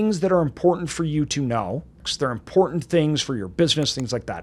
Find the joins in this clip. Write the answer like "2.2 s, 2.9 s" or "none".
2.0 s